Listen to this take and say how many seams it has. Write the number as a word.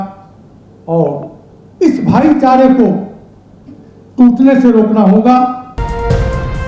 one